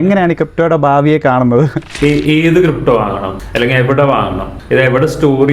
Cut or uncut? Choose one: cut